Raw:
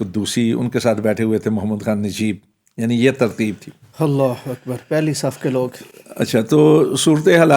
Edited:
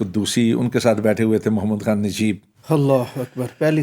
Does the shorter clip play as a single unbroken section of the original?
no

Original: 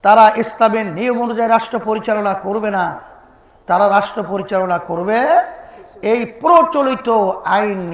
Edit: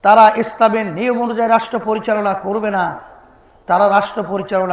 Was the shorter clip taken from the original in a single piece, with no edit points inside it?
yes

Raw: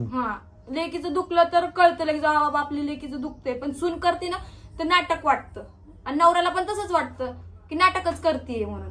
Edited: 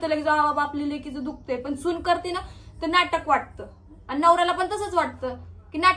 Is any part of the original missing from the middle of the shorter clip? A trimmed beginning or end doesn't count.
no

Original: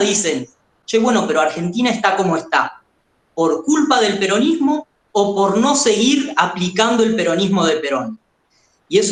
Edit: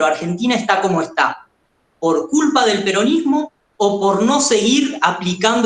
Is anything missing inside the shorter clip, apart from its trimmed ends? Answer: no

